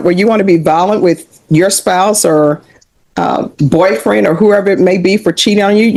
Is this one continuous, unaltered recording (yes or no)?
yes